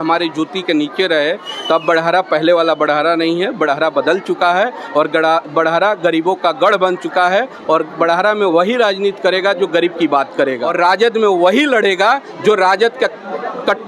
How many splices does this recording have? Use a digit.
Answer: 1